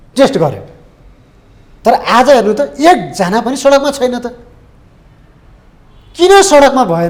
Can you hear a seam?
no; 0 cuts

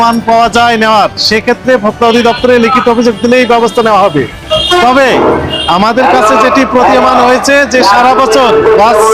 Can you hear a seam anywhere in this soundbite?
no; 0 cuts

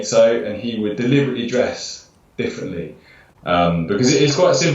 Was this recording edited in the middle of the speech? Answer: yes; 1 cut; at 3.2 s

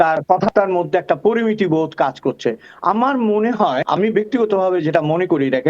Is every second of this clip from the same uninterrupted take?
yes; 0 cuts

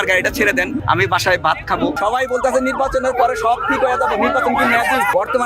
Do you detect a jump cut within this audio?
no; 0 cuts

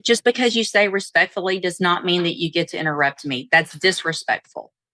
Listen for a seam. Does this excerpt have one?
no; 0 cuts

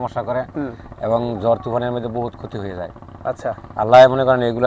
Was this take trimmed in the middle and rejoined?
no; 0 cuts

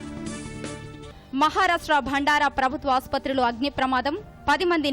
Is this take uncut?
no; 1 cut; at 0.9 s

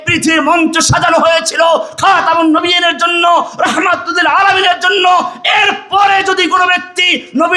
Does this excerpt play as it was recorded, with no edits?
yes; 0 cuts

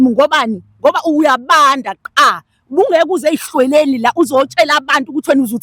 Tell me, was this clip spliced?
no; 0 cuts

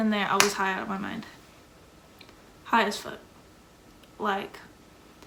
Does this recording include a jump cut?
no; 0 cuts

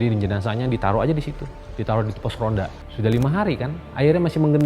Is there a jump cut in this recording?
yes; 1 cut; at 2.8 s

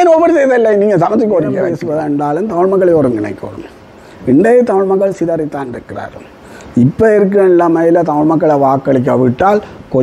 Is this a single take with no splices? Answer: no; 1 cut; at 1.8 s

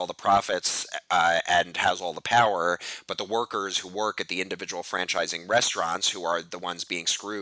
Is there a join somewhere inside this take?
no; 0 cuts

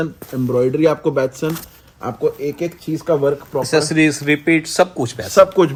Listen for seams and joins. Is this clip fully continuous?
yes; 0 cuts

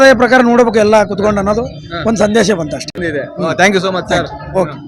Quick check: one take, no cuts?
yes; 0 cuts

